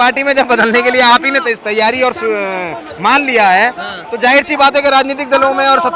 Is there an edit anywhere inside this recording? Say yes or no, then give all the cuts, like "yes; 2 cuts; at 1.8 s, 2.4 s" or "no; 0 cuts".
no; 0 cuts